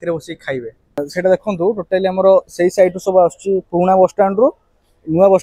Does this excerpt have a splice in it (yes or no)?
yes